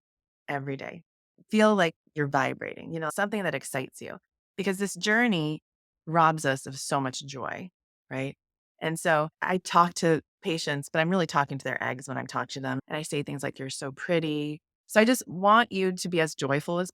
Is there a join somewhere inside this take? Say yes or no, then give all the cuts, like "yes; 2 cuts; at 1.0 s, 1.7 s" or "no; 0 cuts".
yes; 2 cuts; at 3.1 s, 9.4 s